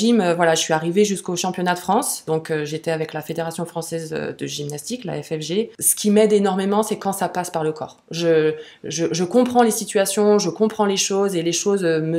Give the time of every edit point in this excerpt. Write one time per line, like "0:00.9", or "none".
0:02.2
0:05.8